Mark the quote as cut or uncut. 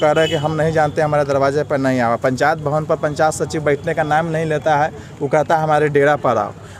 uncut